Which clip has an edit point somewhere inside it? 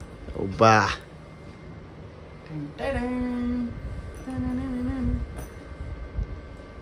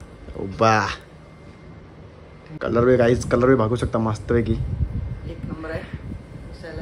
second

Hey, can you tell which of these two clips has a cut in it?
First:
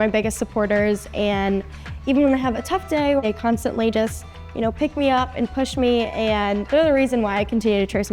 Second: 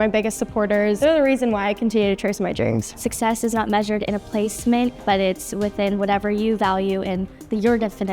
second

